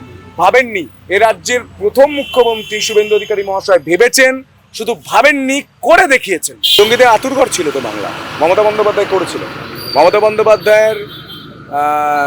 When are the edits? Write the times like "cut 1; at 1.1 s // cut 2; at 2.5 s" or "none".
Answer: cut 1; at 6.6 s